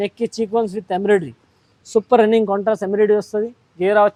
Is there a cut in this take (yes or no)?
no